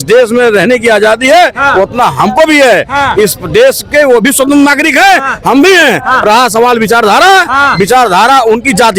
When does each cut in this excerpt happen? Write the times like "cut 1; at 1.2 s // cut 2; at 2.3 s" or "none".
none